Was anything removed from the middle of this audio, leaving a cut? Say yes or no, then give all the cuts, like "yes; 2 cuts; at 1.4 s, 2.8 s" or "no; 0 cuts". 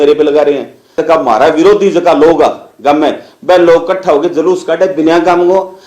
yes; 1 cut; at 1.0 s